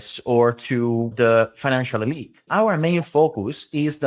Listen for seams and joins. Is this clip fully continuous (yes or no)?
no